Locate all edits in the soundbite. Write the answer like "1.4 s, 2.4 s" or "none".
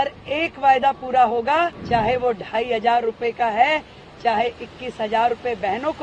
1.8 s